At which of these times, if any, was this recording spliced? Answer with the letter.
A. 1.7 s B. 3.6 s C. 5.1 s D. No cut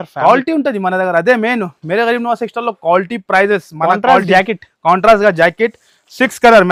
D